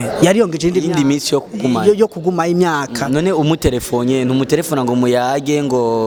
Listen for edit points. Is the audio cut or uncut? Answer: uncut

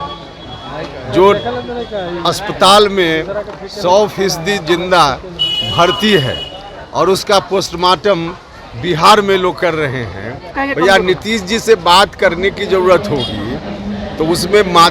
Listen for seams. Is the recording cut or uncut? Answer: cut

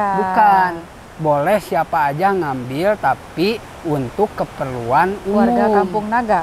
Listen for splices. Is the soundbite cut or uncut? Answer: uncut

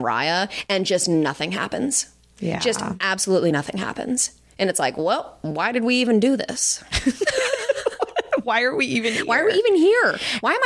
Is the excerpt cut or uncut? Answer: uncut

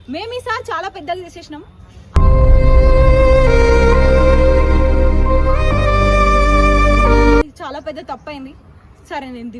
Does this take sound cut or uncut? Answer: uncut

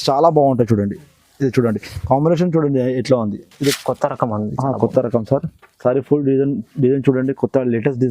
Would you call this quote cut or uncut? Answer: cut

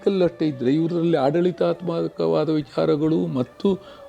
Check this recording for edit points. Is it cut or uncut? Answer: uncut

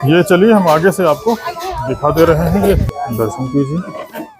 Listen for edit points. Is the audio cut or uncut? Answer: cut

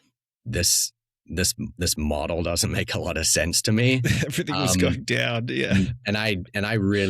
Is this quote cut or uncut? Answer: uncut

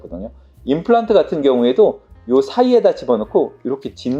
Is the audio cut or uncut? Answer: uncut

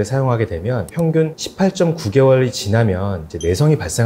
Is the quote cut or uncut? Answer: cut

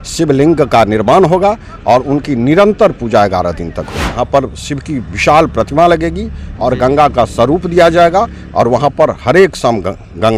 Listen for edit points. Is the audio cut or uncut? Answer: cut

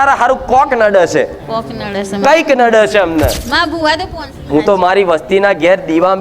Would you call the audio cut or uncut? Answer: cut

